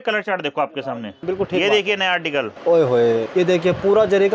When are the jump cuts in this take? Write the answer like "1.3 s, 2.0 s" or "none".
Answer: 1.1 s, 2.5 s, 3.3 s

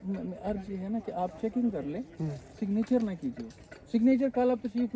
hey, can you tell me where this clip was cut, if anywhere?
none

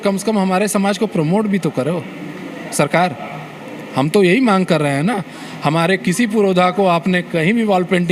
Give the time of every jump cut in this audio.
none

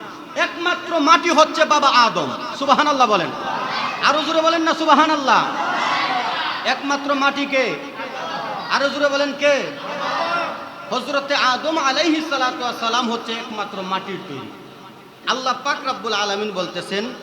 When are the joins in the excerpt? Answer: 15.2 s

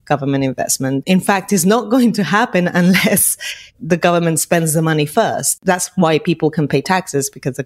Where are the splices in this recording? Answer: 1.0 s, 5.6 s

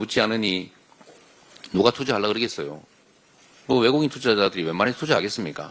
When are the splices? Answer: none

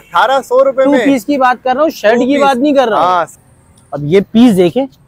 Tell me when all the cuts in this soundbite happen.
3.4 s

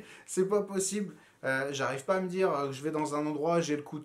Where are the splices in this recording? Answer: none

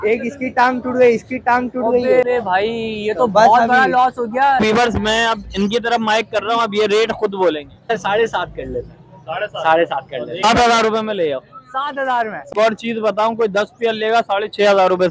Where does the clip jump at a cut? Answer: 2.2 s, 4.6 s, 7.9 s, 10.4 s, 12.4 s

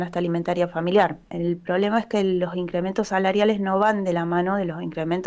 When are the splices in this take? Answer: 1.3 s

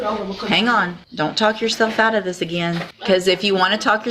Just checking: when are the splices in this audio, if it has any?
1.0 s, 2.9 s

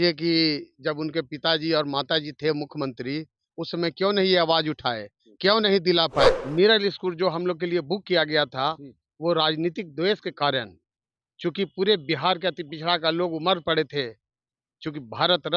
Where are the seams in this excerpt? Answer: 6.4 s

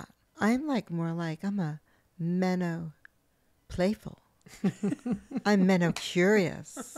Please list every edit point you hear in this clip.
none

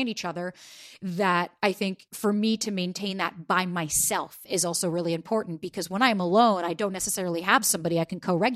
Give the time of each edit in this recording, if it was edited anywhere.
2.1 s

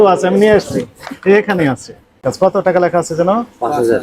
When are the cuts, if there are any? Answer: 2.3 s

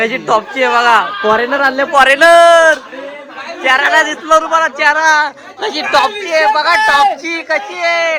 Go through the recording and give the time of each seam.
none

